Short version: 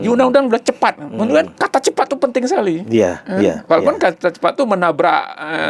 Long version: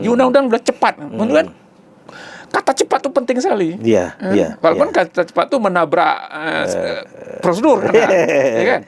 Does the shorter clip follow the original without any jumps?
no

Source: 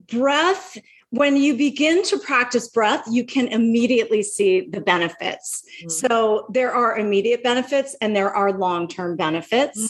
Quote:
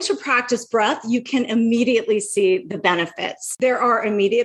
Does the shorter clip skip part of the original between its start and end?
yes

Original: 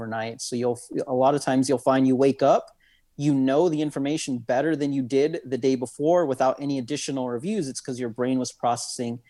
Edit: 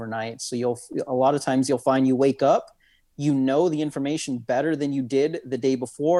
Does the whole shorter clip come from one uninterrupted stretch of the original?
yes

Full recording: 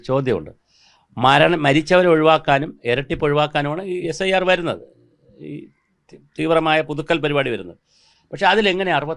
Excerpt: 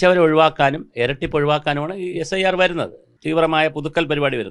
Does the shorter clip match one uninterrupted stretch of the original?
no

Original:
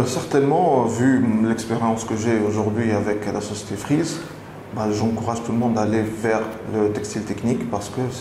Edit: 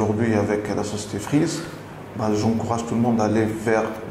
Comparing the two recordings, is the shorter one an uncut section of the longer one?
yes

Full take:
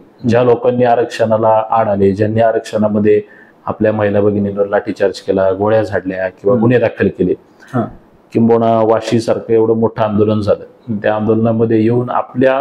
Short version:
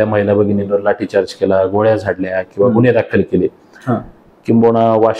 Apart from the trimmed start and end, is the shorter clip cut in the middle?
no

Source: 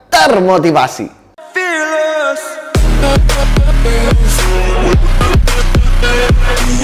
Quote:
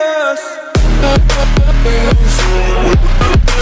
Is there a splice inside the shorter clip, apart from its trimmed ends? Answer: no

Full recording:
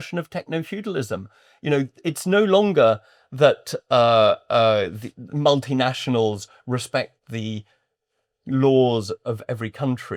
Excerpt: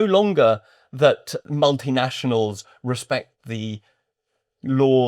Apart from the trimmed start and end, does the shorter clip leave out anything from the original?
yes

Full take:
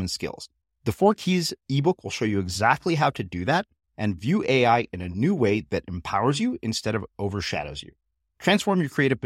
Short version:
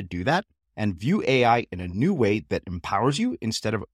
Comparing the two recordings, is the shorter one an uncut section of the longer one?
yes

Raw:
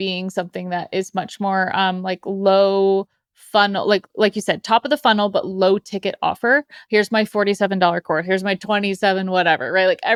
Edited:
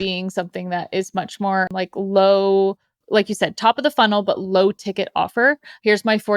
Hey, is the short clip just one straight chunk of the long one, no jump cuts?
no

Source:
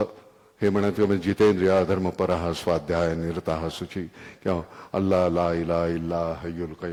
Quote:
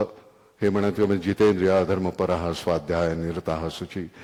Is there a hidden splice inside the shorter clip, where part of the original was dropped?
no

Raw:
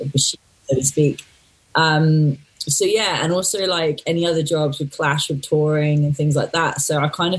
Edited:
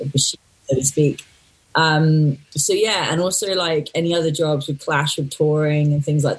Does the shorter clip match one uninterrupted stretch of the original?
no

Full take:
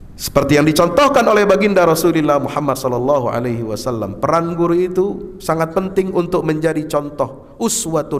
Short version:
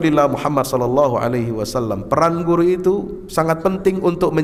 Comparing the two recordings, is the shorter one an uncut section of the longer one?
yes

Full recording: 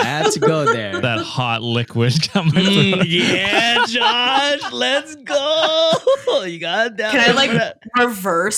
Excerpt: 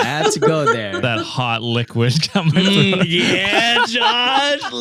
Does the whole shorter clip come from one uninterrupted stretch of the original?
yes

